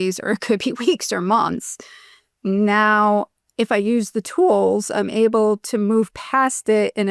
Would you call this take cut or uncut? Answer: uncut